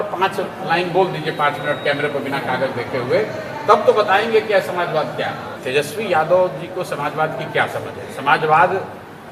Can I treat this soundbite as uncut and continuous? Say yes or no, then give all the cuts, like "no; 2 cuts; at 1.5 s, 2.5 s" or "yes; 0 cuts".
no; 1 cut; at 5.5 s